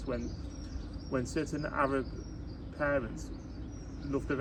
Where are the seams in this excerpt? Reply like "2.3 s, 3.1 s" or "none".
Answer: none

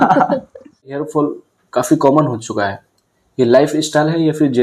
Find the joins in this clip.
1.0 s

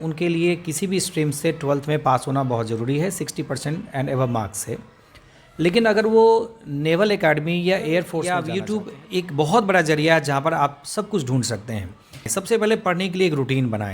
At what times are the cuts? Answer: 8.4 s, 12.3 s

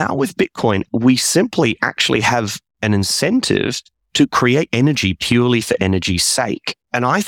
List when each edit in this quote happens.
0.9 s, 2.6 s

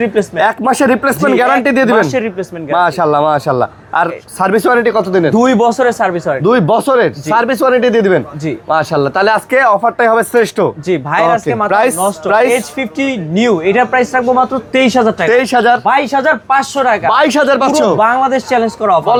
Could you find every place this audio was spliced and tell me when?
none

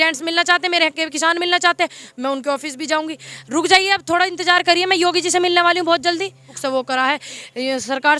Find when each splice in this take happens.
3.3 s, 6.5 s

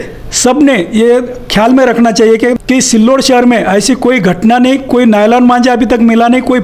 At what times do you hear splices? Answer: 2.5 s

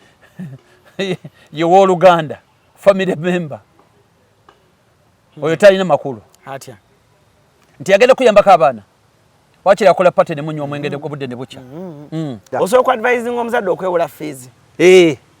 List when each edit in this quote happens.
12.5 s

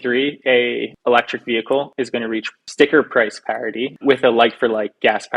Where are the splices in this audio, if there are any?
0.9 s, 2.1 s, 3.9 s

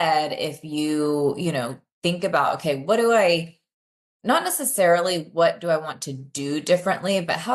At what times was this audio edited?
none

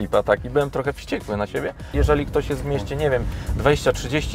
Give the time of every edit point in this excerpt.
1.9 s

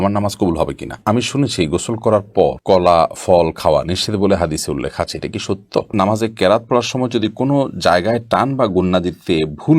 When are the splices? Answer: 1.0 s, 5.9 s

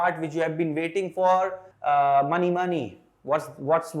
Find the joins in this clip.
1.7 s

